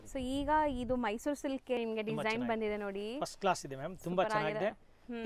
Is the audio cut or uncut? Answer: cut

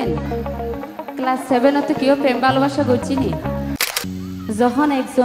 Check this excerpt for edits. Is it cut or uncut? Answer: cut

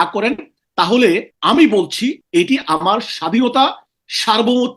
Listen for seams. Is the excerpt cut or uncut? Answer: cut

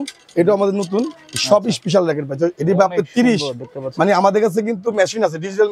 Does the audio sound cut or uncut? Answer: uncut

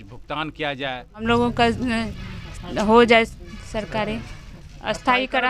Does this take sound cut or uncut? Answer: cut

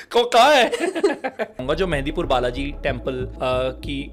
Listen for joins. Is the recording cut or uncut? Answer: cut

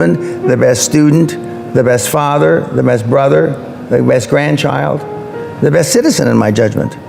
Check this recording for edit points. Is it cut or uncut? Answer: uncut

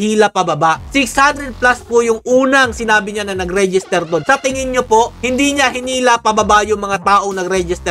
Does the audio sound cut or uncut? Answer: uncut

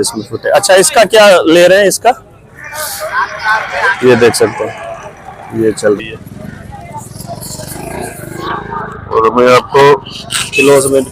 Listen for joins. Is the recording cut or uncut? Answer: cut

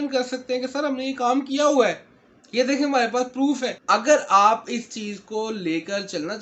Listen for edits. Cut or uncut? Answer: uncut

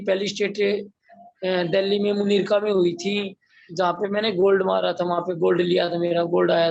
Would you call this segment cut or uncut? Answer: uncut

